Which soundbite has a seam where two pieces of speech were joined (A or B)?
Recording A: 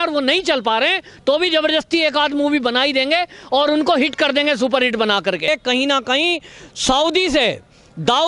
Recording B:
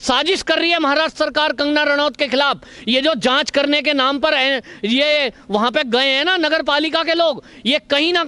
A